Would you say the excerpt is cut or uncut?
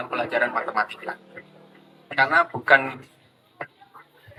uncut